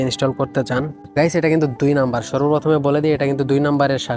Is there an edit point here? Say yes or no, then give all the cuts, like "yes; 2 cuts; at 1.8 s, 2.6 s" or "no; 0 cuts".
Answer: no; 0 cuts